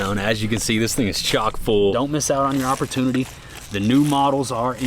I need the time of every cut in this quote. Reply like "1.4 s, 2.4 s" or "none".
1.9 s

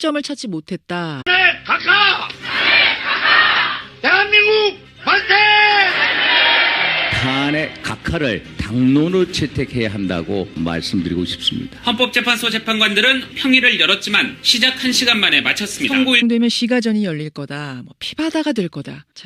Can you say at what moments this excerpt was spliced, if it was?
none

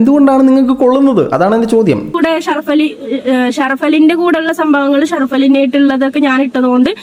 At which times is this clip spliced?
2.1 s

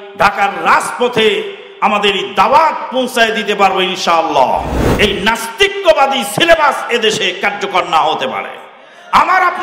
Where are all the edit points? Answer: 4.8 s

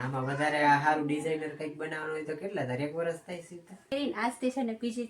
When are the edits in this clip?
3.9 s

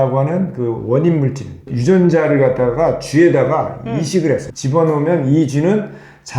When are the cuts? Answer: 1.7 s, 4.5 s

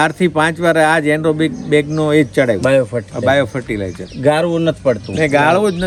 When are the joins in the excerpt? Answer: none

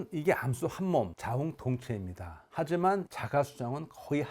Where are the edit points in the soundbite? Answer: 1.2 s

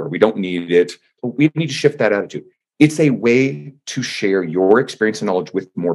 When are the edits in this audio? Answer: 1.1 s

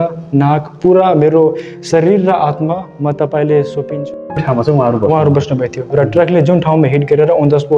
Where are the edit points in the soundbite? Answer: 4.4 s

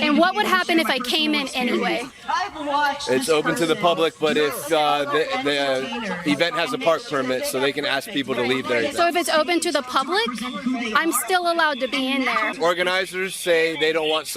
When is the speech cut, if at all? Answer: 9.5 s, 12.6 s

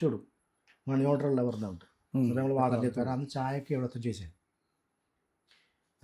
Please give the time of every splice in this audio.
3.0 s

